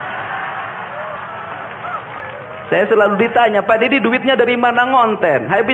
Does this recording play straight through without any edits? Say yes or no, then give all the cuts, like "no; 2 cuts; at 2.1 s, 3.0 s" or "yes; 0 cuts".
no; 1 cut; at 2.2 s